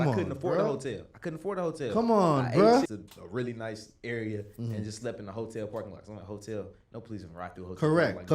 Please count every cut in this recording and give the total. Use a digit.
0